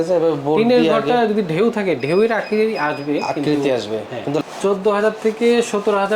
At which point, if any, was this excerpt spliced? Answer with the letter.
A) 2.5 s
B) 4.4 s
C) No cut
B